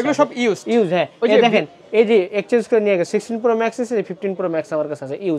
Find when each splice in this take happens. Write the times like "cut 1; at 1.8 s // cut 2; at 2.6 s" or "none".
none